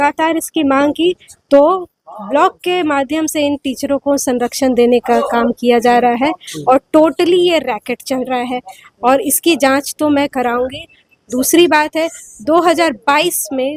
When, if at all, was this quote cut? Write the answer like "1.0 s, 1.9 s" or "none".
none